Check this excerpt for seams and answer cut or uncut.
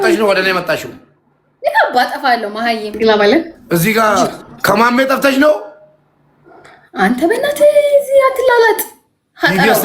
cut